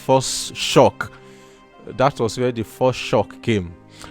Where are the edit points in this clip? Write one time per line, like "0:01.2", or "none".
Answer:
none